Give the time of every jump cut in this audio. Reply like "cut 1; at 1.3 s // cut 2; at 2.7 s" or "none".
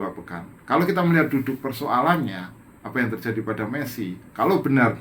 none